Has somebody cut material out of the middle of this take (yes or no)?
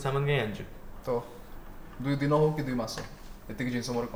no